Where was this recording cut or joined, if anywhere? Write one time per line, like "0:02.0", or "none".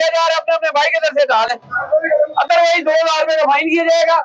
none

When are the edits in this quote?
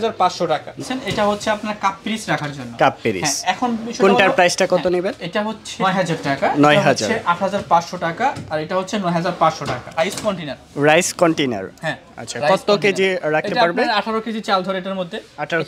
0:00.8
0:05.7
0:09.9

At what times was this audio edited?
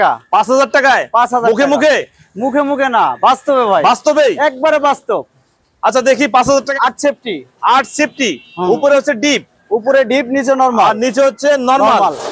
0:06.7

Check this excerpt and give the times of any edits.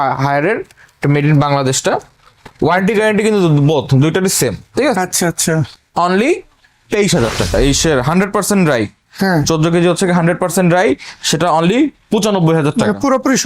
0:07.5

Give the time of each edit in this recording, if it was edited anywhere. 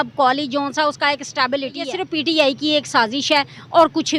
0:02.0

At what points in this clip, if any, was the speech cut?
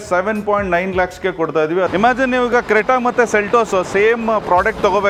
0:01.9

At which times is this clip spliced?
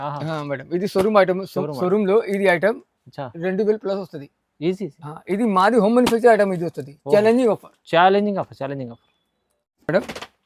none

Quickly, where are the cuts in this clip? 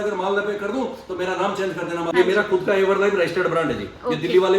0:02.1

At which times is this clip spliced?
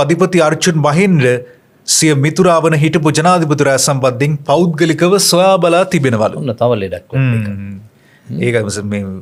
none

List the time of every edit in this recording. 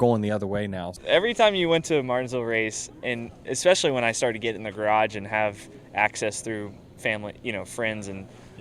0:01.0

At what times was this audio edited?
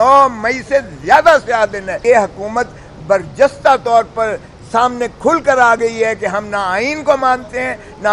0:01.9

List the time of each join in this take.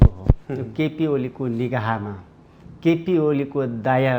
none

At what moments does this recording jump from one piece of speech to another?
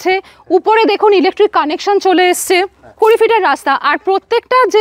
0:03.0

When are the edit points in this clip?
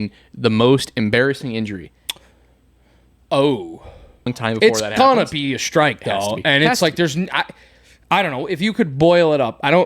0:04.3

